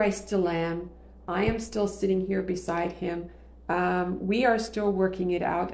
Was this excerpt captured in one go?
yes; 0 cuts

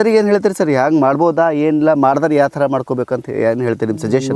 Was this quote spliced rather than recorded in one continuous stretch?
no; 0 cuts

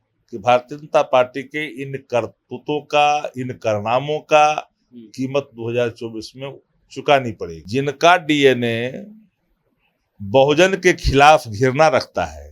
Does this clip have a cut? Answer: yes; 1 cut; at 7.5 s

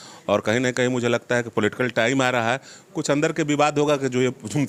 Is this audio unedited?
yes; 0 cuts

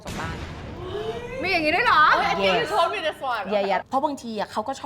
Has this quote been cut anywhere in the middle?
no; 0 cuts

